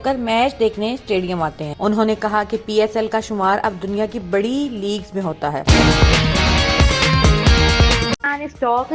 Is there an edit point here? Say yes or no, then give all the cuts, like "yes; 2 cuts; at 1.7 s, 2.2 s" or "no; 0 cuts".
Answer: yes; 2 cuts; at 5.6 s, 8.1 s